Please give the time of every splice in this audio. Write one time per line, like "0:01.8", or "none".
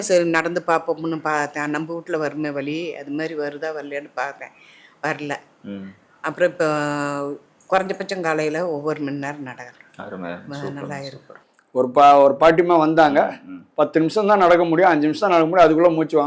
none